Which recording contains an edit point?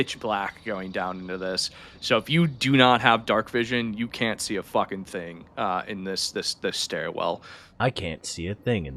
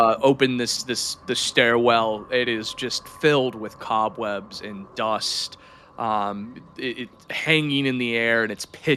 first; 1 cut; at 7.6 s

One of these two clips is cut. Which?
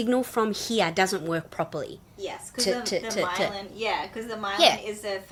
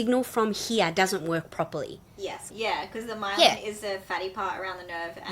second; 1 cut; at 2.4 s

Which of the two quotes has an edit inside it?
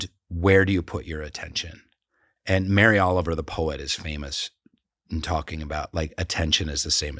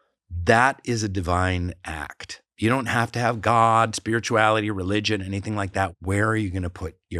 second; 1 cut; at 5.9 s

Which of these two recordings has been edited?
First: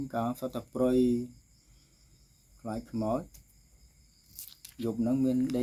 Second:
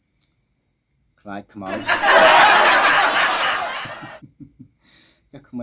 second; 2 cuts; at 1.7 s, 4.3 s

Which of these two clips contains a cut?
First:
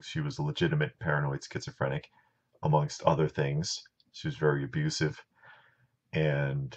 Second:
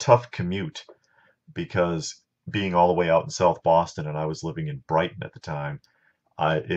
first; 1 cut; at 2.7 s

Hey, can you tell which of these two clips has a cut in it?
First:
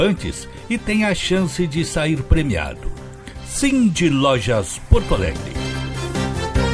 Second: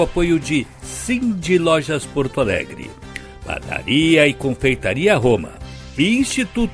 first; 1 cut; at 5.4 s

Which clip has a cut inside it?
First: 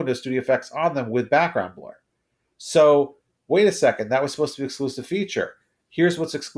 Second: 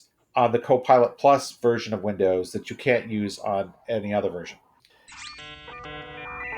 second; 1 cut; at 4.9 s

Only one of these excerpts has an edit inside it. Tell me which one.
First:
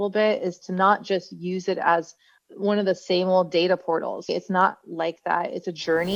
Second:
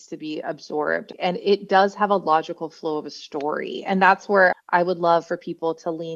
second; 2 cuts; at 1.1 s, 4.5 s

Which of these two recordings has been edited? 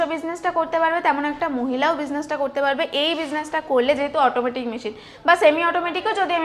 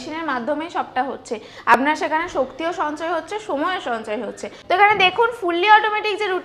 second; 1 cut; at 4.5 s

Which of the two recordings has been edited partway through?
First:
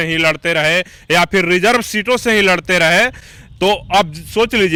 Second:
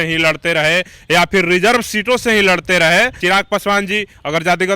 second; 1 cut; at 3.2 s

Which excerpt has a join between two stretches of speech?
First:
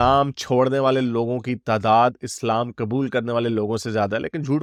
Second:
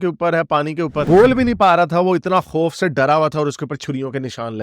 second; 1 cut; at 1.1 s

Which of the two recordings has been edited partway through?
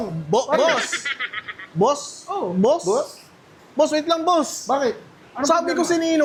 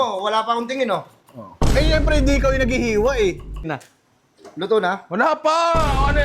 second; 1 cut; at 3.8 s

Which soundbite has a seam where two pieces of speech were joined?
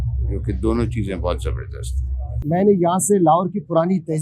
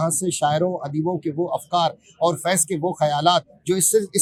first; 1 cut; at 2.2 s

